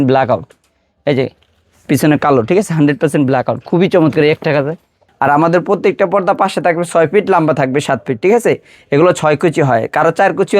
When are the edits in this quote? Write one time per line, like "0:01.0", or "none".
0:05.0